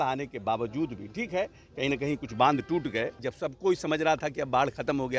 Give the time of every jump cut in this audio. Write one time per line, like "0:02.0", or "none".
0:03.2